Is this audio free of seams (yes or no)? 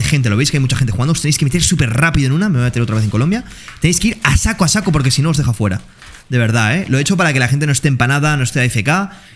yes